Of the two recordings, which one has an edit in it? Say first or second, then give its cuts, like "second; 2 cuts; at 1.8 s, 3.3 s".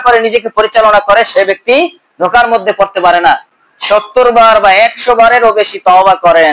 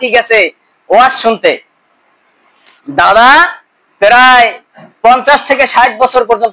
first; 1 cut; at 3.5 s